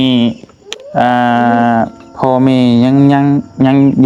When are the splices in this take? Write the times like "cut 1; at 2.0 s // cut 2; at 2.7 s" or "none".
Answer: none